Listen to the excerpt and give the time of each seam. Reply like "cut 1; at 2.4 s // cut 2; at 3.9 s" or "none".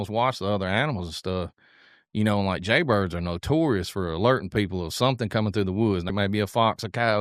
cut 1; at 6.1 s